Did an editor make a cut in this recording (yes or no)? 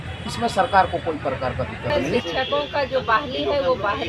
yes